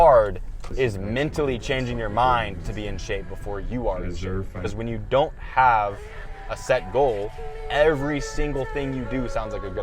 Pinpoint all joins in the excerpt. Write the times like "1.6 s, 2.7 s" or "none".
4.6 s